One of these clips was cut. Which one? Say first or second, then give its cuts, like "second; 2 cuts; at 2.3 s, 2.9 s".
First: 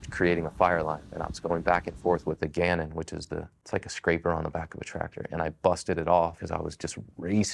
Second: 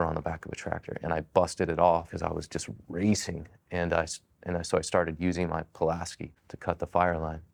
first; 1 cut; at 1.1 s